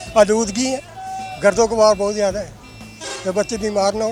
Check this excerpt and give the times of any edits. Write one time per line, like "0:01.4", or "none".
none